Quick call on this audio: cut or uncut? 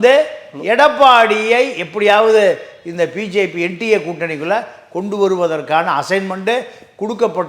uncut